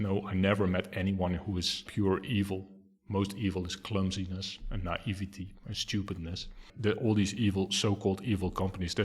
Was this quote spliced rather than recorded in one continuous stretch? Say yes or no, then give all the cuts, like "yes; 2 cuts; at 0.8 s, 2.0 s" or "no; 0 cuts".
yes; 2 cuts; at 1.8 s, 6.7 s